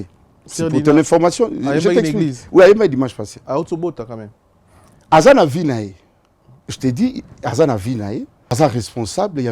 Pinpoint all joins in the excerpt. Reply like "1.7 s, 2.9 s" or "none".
8.5 s